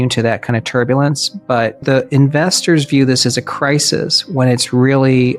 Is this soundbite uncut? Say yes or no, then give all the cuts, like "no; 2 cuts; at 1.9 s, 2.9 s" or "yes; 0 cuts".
no; 1 cut; at 1.8 s